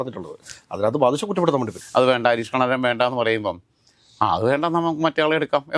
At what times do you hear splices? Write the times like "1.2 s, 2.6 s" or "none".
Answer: 1.8 s